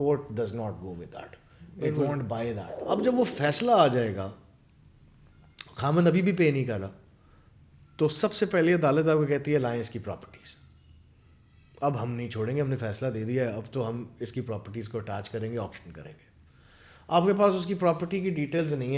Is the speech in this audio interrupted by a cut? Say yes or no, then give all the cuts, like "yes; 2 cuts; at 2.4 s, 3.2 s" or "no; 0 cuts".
yes; 1 cut; at 2.7 s